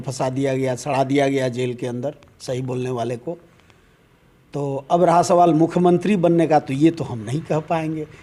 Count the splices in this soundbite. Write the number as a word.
zero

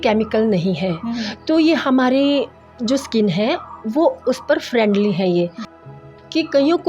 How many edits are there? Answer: one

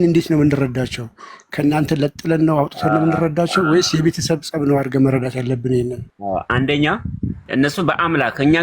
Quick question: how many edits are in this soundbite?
two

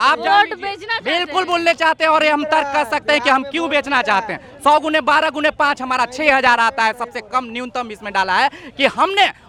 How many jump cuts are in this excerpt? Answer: zero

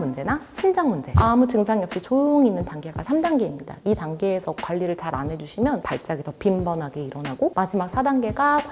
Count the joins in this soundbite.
three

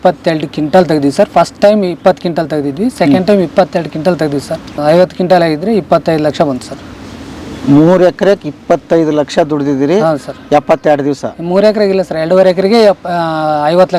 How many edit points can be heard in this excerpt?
one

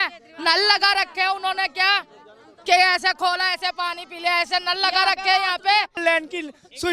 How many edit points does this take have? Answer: one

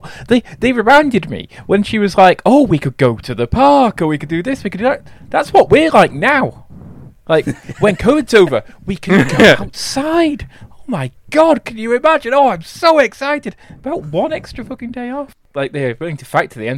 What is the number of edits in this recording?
one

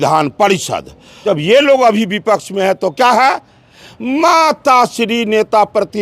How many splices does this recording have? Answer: one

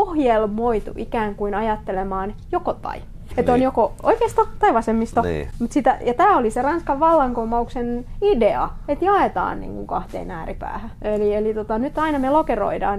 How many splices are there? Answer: two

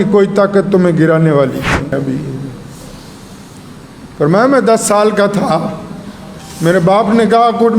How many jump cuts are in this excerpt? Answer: one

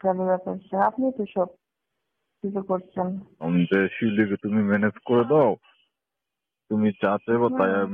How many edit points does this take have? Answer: one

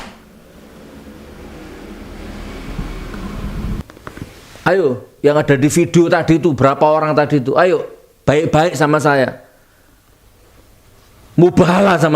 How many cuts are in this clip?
one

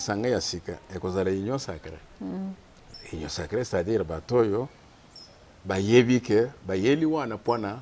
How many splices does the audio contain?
zero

